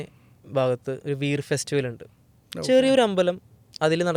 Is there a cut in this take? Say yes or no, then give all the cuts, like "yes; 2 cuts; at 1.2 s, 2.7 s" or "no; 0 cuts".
no; 0 cuts